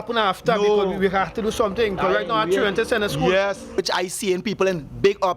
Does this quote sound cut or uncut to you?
cut